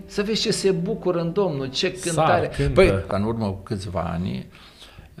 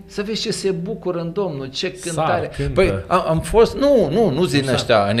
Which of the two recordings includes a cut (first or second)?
first